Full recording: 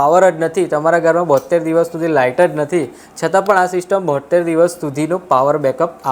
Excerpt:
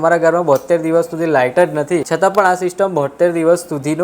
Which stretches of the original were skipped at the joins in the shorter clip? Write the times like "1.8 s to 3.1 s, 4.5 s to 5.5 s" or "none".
2.9 s to 3.2 s